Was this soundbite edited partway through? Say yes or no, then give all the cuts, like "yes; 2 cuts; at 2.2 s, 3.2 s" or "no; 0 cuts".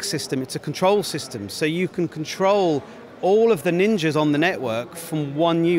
no; 0 cuts